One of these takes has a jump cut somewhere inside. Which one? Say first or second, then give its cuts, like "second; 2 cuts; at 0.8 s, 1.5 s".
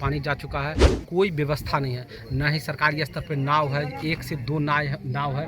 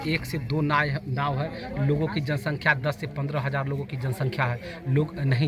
first; 1 cut; at 0.9 s